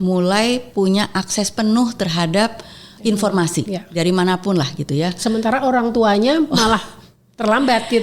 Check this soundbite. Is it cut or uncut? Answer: uncut